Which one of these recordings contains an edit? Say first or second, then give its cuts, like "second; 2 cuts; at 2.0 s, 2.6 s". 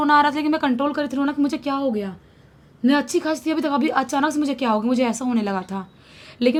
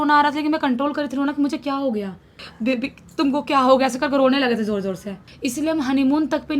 second; 2 cuts; at 2.4 s, 5.3 s